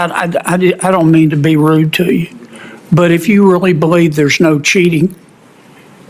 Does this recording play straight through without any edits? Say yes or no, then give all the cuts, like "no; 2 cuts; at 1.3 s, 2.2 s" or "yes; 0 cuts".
yes; 0 cuts